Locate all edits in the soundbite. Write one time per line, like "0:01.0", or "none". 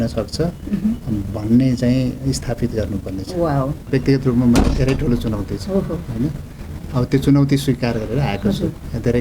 0:03.9